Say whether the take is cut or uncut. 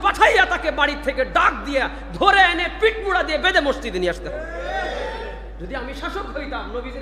uncut